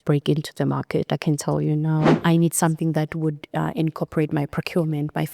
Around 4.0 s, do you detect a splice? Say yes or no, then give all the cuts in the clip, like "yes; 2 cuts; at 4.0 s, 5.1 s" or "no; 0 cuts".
no; 1 cut; at 2.1 s